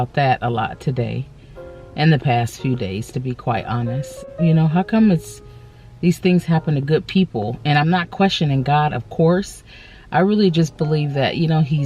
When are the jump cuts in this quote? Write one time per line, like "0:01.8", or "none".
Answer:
0:04.2